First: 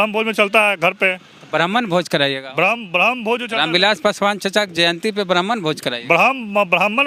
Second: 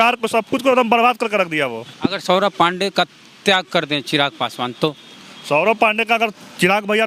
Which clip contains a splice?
second; 1 cut; at 1.9 s

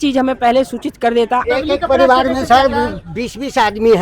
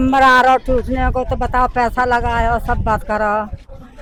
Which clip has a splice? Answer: first; 1 cut; at 1.5 s

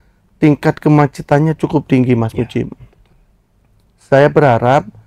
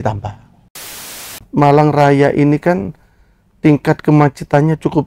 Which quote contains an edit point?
second; 1 cut; at 1.0 s

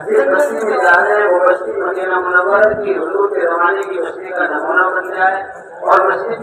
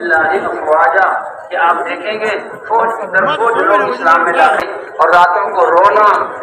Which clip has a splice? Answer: second; 1 cut; at 4.6 s

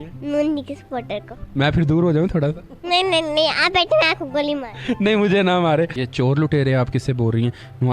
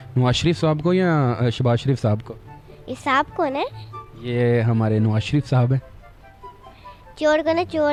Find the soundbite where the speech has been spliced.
first; 1 cut; at 6.0 s

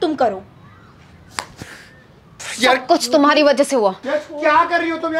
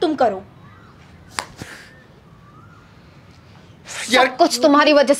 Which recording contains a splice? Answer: first; 2 cuts; at 2.3 s, 4.1 s

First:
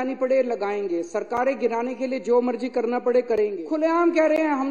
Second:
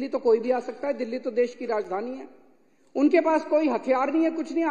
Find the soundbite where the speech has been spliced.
first; 1 cut; at 3.6 s

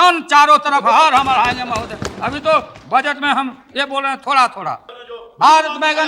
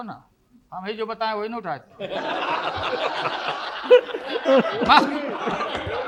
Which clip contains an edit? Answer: first; 1 cut; at 4.9 s

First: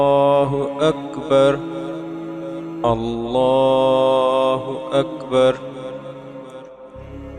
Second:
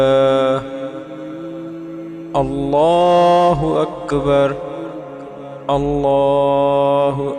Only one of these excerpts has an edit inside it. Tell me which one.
second; 2 cuts; at 1.0 s, 2.3 s

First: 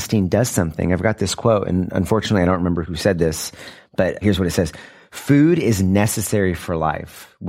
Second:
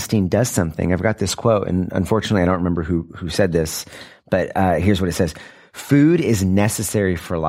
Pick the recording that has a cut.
first; 2 cuts; at 2.8 s, 4.2 s

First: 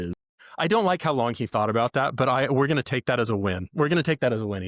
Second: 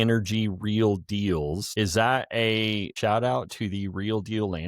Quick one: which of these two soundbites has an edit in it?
second; 2 cuts; at 1.7 s, 2.9 s

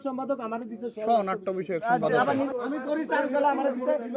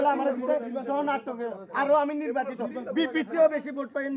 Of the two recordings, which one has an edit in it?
first; 1 cut; at 2.5 s

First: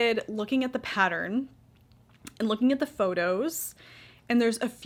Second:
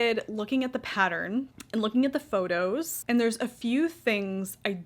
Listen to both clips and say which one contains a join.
second; 2 cuts; at 1.6 s, 2.9 s

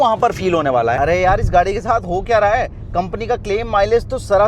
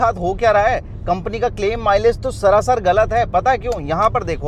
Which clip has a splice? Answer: first; 1 cut; at 1.0 s

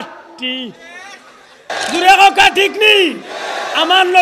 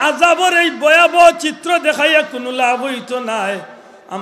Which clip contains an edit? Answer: first; 1 cut; at 1.7 s

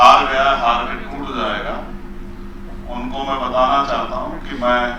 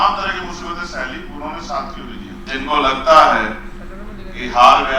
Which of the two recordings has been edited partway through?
second; 1 cut; at 2.5 s

